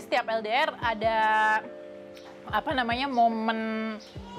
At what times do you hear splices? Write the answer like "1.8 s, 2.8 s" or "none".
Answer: none

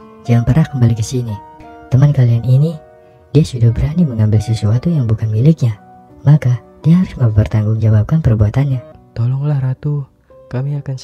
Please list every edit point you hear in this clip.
9.0 s

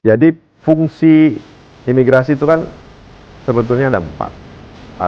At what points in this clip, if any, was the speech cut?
none

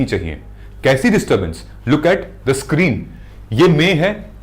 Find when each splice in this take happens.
none

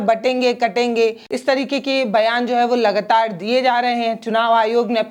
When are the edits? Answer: 1.3 s

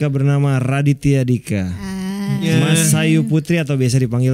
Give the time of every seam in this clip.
2.5 s

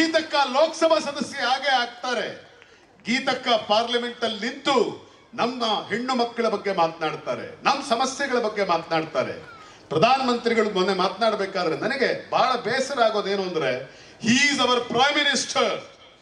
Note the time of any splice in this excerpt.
none

